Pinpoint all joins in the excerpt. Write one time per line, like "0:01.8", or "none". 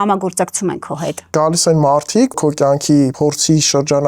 0:01.3
0:02.3
0:03.1